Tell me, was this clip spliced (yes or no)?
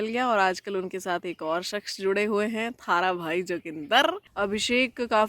yes